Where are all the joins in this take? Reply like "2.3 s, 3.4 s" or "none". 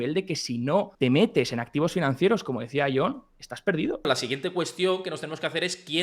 0.9 s, 4.1 s